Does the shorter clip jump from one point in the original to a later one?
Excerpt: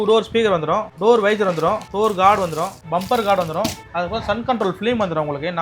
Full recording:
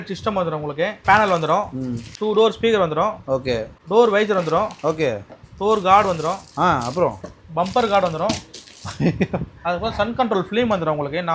yes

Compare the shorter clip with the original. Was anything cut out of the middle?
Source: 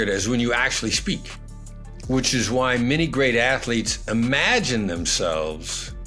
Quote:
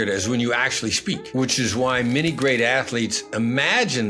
yes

